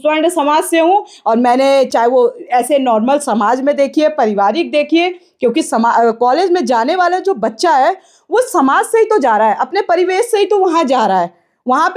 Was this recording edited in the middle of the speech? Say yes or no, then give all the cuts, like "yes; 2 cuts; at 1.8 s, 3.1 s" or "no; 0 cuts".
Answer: no; 0 cuts